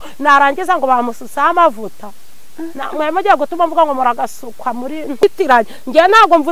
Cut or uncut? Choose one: cut